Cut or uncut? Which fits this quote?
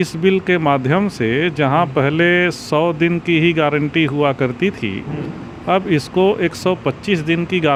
uncut